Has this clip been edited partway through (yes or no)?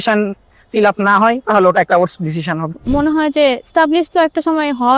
yes